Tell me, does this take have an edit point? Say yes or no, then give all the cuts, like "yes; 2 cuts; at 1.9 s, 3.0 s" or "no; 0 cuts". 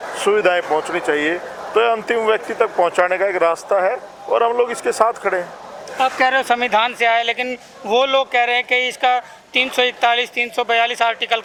no; 0 cuts